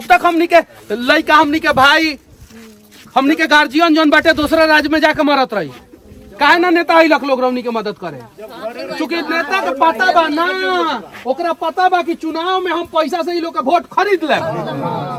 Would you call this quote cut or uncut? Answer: uncut